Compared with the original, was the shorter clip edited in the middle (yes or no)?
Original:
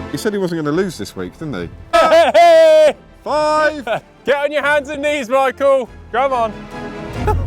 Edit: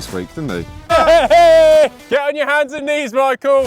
yes